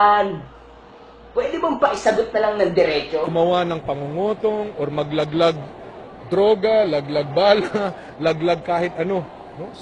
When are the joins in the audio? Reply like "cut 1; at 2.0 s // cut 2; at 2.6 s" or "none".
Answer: none